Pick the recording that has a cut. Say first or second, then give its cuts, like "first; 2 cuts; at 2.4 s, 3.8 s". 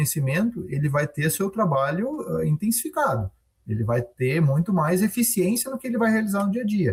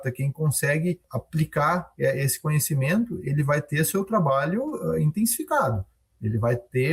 second; 1 cut; at 1.1 s